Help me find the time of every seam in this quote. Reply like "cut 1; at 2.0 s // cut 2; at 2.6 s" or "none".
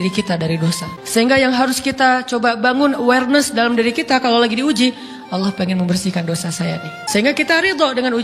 cut 1; at 0.9 s // cut 2; at 6.9 s